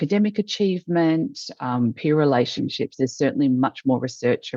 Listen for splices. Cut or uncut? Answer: uncut